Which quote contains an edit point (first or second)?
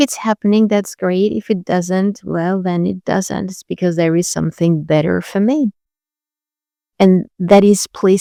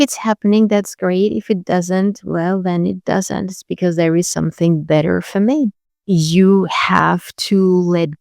second